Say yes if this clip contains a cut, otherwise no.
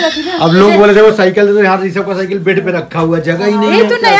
no